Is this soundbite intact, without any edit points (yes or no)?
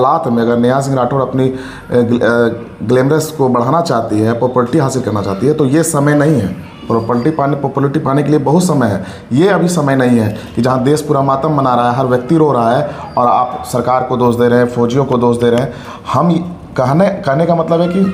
yes